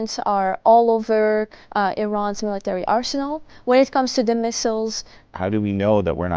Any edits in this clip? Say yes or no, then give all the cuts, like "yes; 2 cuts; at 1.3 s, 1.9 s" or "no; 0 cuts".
yes; 1 cut; at 5.0 s